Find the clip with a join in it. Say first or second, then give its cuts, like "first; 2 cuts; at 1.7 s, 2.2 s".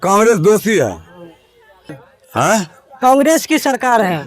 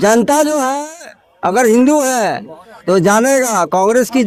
first; 1 cut; at 1.9 s